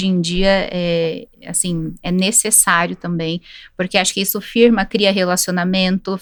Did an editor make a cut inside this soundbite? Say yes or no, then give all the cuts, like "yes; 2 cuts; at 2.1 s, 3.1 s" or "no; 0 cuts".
no; 0 cuts